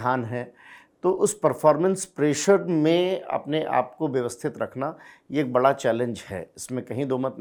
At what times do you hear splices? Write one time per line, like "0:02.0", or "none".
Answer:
none